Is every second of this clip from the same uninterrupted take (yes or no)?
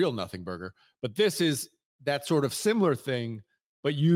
yes